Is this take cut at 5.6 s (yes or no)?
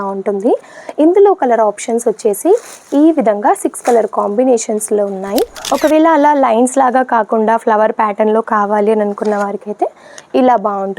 yes